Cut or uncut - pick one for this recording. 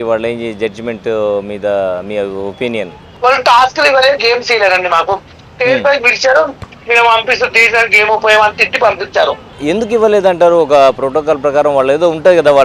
cut